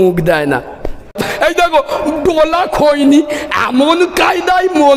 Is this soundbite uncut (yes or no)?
no